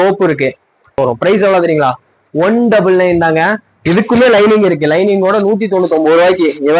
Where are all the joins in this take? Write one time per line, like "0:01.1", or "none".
0:01.0